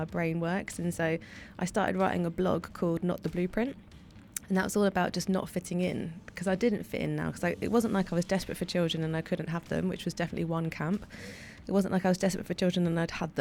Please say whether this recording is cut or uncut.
uncut